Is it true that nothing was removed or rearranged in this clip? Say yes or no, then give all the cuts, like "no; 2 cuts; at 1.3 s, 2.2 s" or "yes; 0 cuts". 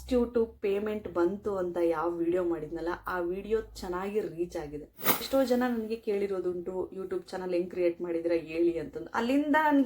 no; 1 cut; at 5.1 s